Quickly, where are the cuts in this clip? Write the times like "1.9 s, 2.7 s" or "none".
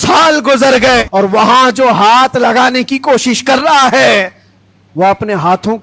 1.1 s